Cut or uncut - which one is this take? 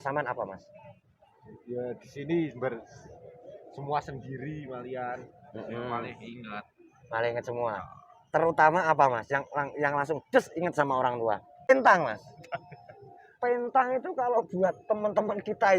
cut